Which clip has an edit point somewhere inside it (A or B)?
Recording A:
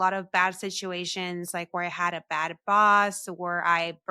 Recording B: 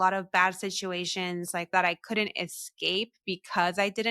B